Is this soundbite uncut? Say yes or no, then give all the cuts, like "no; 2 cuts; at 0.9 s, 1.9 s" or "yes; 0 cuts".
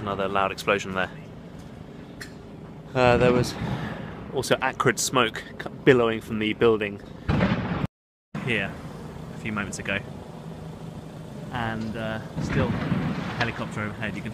yes; 0 cuts